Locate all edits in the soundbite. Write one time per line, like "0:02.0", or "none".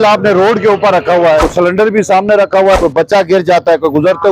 0:01.5
0:02.8